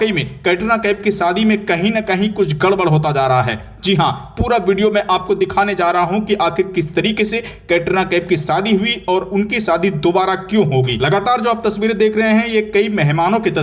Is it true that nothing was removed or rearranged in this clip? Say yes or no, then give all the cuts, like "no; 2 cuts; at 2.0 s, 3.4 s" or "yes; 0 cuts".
no; 1 cut; at 10.9 s